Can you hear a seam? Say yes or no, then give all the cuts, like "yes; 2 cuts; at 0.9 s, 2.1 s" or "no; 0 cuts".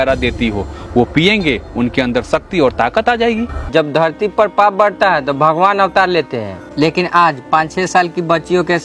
yes; 1 cut; at 3.6 s